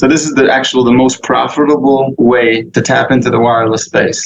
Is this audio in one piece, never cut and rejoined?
no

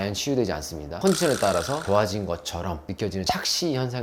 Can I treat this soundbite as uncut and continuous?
no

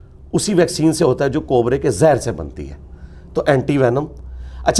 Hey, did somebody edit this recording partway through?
no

